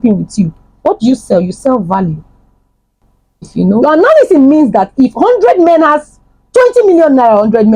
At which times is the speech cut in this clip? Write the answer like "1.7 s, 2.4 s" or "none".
3.8 s